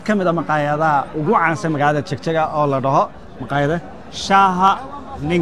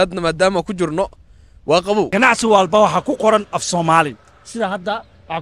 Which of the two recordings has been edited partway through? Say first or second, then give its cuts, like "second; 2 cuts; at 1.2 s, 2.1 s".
second; 1 cut; at 2.1 s